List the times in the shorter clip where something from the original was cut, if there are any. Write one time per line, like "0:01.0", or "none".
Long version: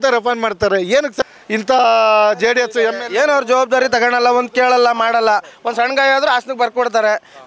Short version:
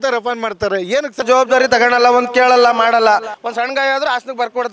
0:01.2